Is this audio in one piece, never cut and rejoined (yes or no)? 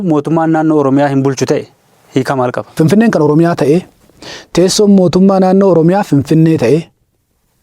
no